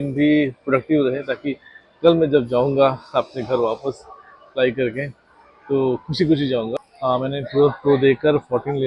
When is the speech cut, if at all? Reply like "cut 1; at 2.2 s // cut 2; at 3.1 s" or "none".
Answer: cut 1; at 6.7 s